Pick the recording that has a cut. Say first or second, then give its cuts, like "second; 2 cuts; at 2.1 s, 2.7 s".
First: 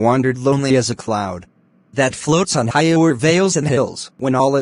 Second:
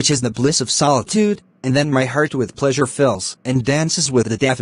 second; 1 cut; at 2.8 s